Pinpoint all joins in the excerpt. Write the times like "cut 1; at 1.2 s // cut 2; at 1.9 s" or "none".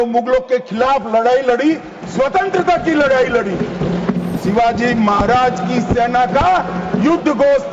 cut 1; at 4.4 s